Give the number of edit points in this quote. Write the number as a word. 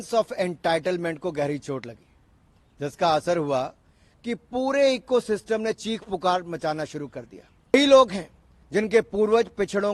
one